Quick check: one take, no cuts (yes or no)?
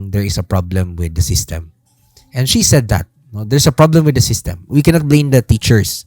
yes